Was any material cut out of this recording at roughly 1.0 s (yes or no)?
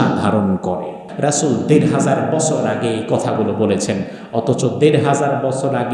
yes